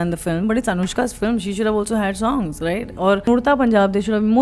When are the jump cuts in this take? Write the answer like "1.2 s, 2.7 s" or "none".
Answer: 3.3 s